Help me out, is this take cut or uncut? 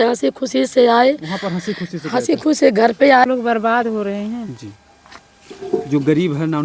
cut